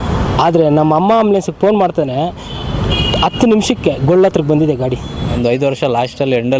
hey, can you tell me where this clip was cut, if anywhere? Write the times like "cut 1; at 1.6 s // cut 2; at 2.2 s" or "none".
cut 1; at 5.3 s

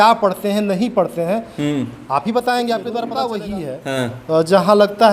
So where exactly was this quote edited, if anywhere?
cut 1; at 3.3 s

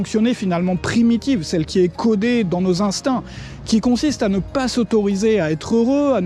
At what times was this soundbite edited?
none

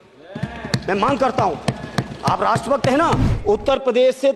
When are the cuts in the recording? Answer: cut 1; at 3.3 s

